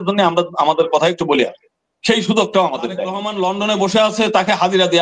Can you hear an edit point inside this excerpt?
yes; 1 cut; at 3.2 s

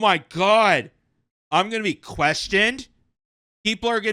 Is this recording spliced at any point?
no; 0 cuts

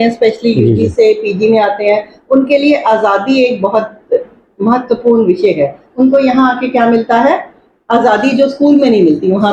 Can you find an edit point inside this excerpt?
no; 0 cuts

